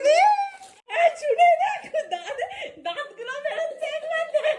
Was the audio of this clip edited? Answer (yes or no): yes